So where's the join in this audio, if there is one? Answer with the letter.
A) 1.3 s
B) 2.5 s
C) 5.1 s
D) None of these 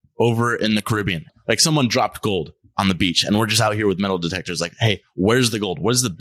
A